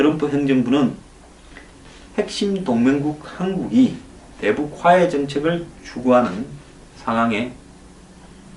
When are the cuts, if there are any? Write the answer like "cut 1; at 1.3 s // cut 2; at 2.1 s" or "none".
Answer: cut 1; at 1.1 s